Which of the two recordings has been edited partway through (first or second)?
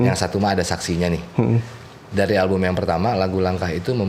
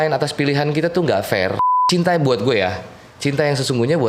second